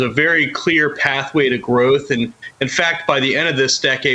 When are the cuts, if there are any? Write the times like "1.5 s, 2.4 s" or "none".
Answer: none

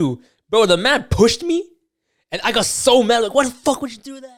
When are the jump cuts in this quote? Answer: none

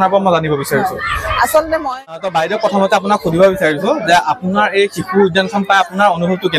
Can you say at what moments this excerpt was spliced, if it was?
2.2 s

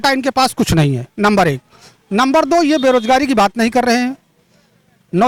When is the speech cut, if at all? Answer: none

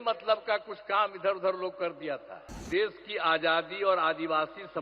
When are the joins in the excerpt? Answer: 2.6 s

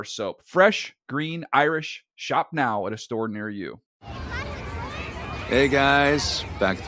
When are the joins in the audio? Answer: 3.8 s

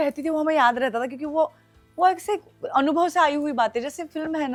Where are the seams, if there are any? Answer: none

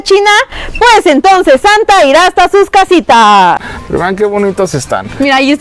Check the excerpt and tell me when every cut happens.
3.7 s

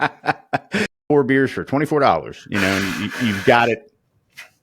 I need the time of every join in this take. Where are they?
0.9 s

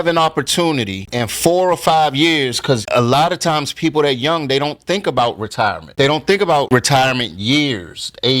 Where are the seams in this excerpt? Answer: 5.9 s

